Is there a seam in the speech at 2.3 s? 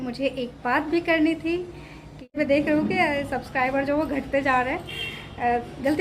yes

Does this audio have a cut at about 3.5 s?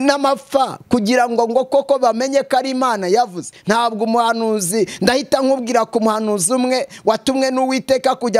no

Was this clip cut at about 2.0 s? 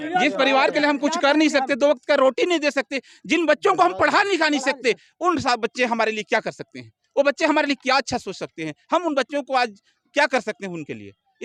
no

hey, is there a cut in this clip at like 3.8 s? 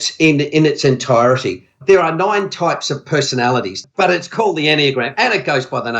yes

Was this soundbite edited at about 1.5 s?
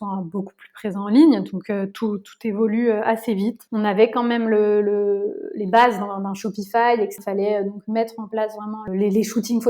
no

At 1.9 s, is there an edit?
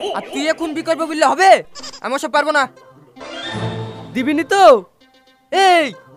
yes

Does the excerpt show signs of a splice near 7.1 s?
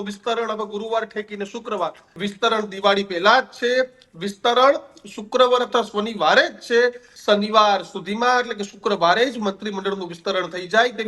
yes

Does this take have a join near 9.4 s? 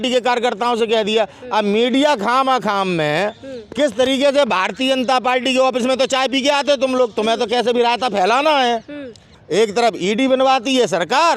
yes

